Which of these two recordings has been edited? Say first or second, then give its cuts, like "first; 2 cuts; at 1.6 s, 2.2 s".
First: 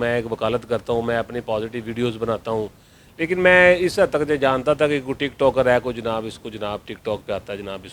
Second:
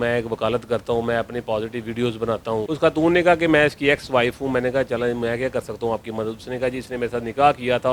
second; 1 cut; at 2.7 s